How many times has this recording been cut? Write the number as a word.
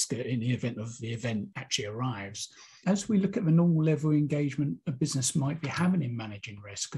two